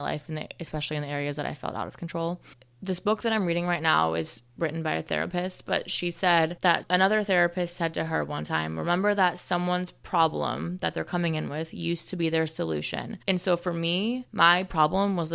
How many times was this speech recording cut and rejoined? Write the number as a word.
three